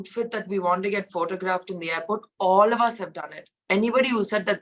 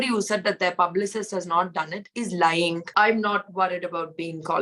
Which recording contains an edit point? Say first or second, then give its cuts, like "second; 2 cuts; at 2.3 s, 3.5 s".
second; 1 cut; at 2.9 s